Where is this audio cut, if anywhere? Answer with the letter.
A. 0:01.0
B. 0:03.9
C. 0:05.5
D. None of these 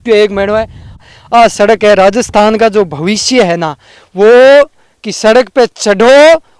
A